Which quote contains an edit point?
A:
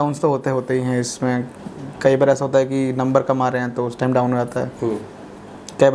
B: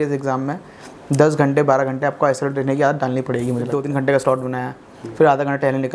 B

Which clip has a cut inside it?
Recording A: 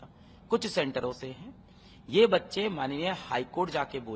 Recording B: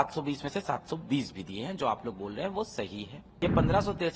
B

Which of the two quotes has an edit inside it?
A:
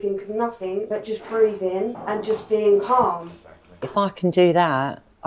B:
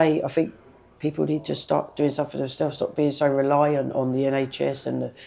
A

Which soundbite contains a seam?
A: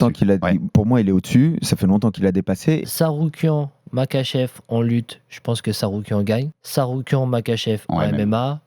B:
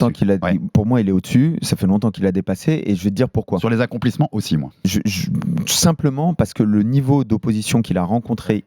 A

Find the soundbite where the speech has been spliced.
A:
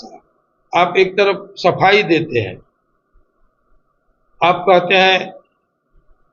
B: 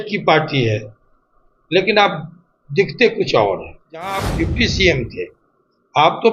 B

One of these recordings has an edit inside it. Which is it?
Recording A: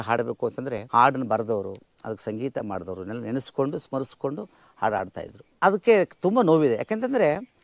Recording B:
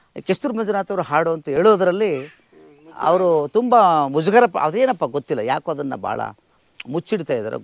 A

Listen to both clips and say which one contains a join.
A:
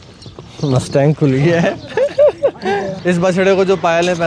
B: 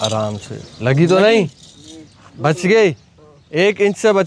A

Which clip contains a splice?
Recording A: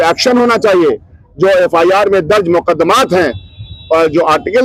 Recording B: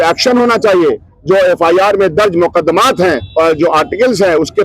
B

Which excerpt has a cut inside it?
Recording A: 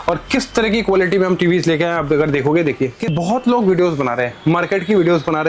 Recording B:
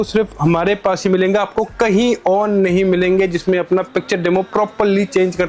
A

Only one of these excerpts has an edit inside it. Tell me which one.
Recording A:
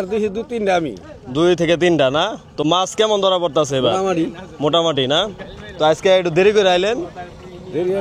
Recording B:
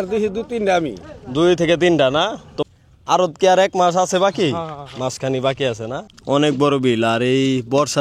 B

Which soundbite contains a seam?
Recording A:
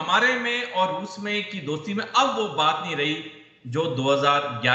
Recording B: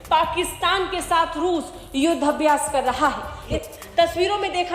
B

